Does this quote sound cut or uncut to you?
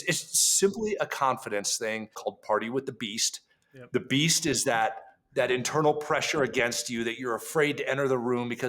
cut